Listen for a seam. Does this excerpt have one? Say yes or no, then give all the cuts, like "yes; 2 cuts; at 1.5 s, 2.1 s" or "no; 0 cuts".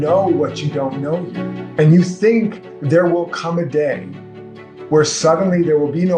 yes; 1 cut; at 1.6 s